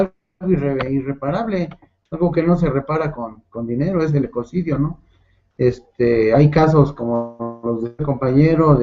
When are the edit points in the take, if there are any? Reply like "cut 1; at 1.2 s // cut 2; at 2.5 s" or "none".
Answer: cut 1; at 4.3 s